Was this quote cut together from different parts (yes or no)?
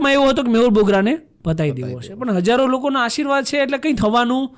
no